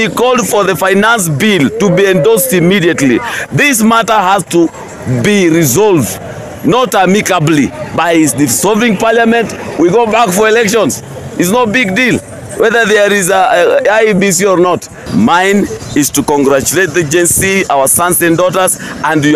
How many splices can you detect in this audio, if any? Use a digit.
1